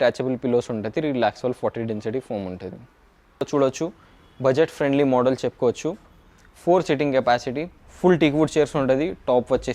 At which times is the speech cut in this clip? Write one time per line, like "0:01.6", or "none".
0:03.4